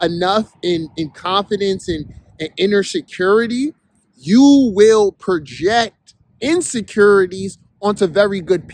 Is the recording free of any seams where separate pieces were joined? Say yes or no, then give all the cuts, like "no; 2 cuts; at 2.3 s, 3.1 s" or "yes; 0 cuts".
no; 1 cut; at 7.6 s